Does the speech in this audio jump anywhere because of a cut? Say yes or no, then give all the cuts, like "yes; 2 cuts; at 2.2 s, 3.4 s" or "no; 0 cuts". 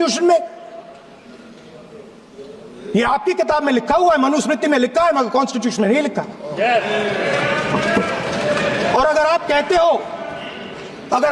no; 0 cuts